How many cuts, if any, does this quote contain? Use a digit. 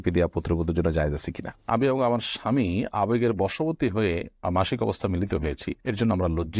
1